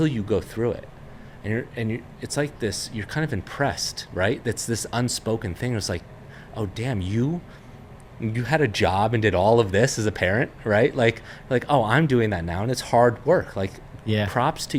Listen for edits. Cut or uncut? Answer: uncut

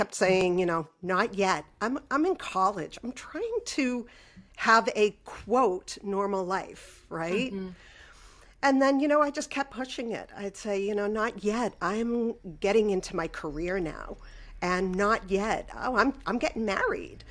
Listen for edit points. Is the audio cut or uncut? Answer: uncut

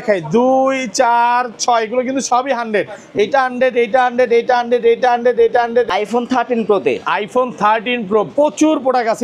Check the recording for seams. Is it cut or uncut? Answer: cut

